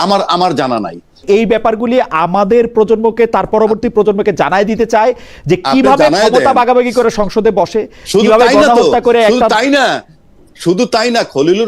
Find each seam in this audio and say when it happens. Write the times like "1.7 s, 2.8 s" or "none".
1.2 s